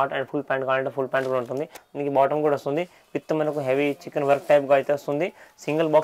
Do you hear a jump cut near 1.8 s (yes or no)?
yes